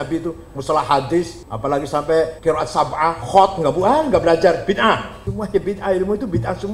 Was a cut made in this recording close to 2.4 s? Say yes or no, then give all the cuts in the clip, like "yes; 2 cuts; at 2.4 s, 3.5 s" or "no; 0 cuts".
yes; 3 cuts; at 1.4 s, 2.4 s, 5.2 s